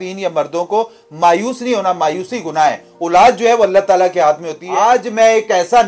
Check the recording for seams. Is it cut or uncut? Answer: cut